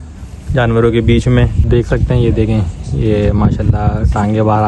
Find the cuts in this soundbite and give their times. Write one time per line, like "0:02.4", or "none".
0:01.6